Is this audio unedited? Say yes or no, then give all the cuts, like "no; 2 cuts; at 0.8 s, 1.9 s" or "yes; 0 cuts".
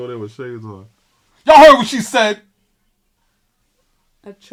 yes; 0 cuts